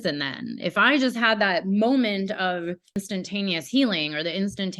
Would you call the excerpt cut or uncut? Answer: cut